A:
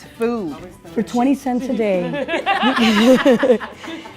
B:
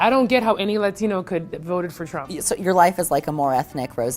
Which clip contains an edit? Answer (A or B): B